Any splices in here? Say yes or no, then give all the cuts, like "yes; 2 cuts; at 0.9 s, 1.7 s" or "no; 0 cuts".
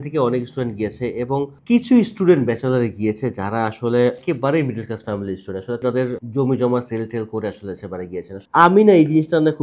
yes; 3 cuts; at 4.2 s, 5.8 s, 8.4 s